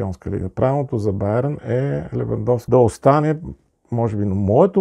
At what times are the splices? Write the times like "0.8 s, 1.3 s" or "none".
2.6 s